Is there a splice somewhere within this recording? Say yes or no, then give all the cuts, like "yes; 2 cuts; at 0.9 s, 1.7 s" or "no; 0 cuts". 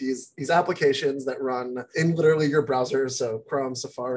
yes; 1 cut; at 1.9 s